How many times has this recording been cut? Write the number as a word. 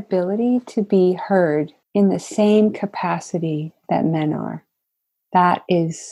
zero